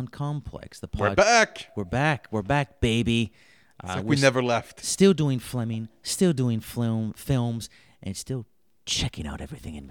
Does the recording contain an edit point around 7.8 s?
no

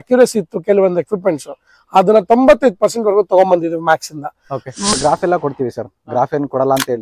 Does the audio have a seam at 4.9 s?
yes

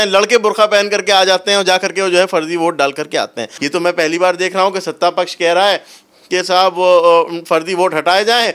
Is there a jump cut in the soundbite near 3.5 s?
yes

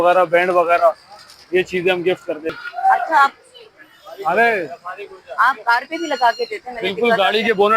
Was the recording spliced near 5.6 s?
no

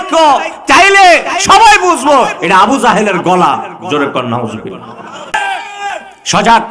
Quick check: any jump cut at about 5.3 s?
yes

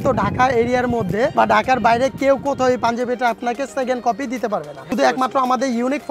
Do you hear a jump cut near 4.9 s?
yes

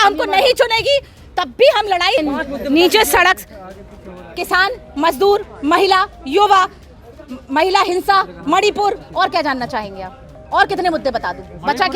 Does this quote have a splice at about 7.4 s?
no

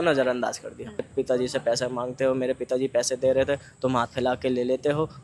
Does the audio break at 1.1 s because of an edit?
yes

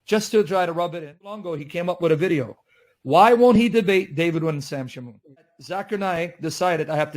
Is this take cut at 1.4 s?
yes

